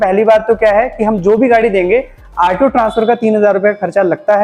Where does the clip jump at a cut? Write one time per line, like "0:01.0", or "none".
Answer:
none